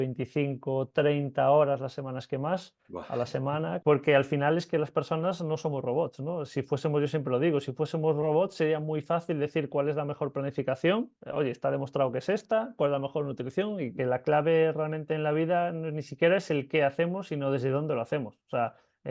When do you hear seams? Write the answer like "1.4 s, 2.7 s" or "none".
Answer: 3.8 s, 13.9 s